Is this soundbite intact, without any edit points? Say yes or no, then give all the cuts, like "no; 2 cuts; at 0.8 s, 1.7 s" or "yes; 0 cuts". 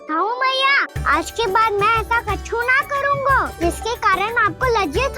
no; 2 cuts; at 0.9 s, 3.5 s